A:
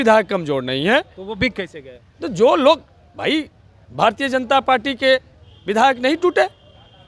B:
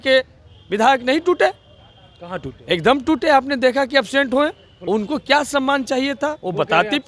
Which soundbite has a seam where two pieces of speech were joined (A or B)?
B